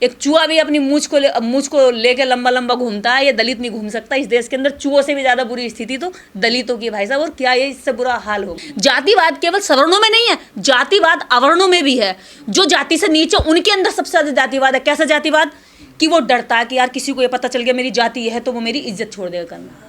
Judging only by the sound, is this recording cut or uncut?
cut